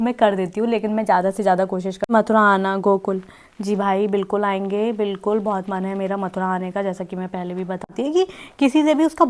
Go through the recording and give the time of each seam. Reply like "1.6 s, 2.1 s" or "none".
2.1 s, 7.9 s